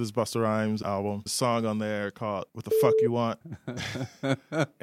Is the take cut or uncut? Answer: cut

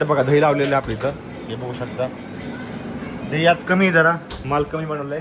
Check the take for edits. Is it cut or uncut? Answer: uncut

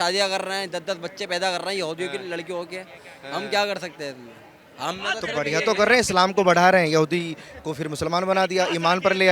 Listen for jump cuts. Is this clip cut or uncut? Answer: uncut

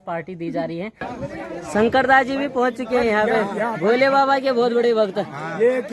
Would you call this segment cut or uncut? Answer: cut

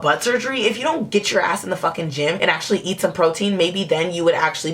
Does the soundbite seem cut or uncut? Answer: uncut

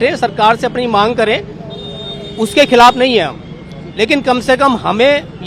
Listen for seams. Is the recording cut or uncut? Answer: uncut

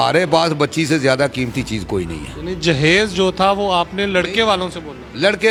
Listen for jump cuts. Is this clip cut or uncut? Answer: uncut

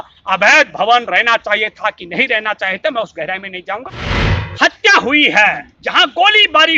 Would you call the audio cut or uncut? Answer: cut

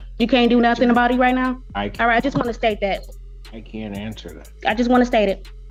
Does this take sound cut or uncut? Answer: uncut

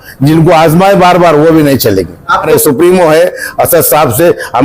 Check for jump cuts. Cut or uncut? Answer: cut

